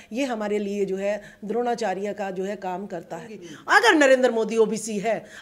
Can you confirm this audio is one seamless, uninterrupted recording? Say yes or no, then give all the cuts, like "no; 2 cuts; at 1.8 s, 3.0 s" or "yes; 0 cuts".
no; 1 cut; at 3.5 s